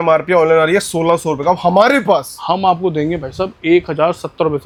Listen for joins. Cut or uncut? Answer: uncut